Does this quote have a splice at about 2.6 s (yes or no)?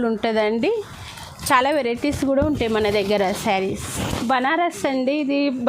no